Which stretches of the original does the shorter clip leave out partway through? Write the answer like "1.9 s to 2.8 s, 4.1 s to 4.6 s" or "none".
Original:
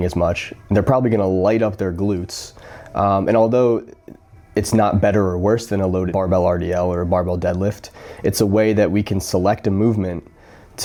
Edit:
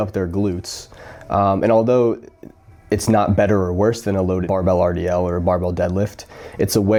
none